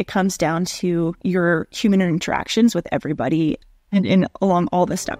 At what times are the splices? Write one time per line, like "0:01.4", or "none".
0:01.2
0:03.6